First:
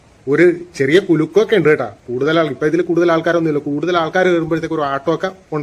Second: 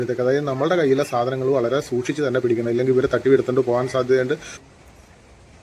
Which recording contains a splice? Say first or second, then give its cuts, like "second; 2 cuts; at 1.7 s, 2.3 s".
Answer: second; 1 cut; at 4.6 s